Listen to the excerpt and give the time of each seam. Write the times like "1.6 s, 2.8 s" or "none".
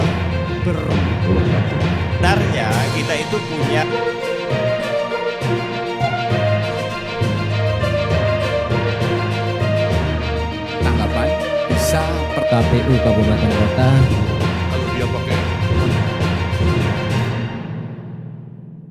none

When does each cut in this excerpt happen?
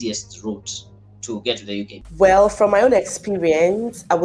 1.9 s

